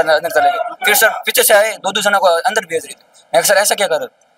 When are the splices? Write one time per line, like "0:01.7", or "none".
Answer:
none